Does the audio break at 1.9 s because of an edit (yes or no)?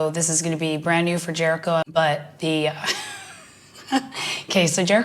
yes